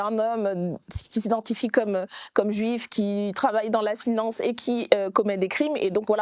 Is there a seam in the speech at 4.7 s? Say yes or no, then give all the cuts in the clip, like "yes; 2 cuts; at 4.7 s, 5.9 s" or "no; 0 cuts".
no; 0 cuts